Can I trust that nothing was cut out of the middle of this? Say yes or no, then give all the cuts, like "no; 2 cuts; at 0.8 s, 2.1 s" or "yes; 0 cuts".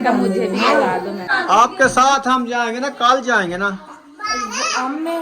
no; 1 cut; at 1.3 s